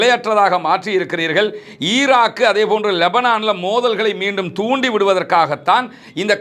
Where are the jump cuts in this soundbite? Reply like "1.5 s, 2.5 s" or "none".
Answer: none